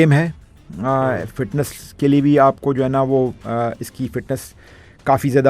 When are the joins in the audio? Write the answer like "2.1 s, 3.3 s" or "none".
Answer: none